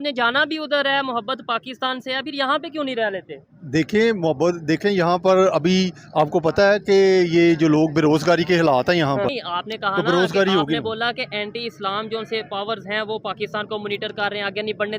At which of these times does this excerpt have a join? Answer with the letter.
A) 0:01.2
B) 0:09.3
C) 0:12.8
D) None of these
B